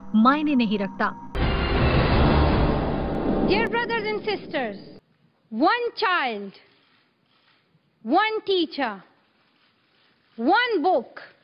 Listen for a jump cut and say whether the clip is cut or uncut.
cut